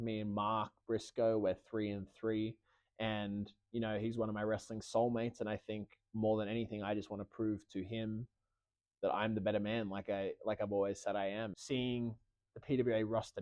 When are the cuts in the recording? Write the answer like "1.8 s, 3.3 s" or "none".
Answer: 11.6 s